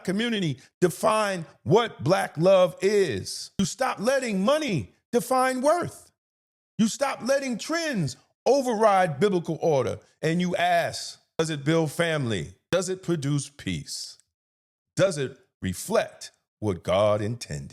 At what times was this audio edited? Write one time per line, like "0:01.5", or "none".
0:03.6
0:11.4
0:12.6